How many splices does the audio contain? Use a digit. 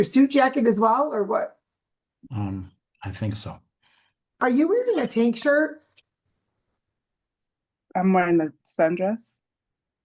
1